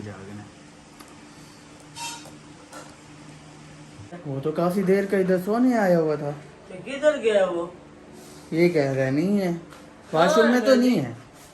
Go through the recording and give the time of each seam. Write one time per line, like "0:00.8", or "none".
0:04.2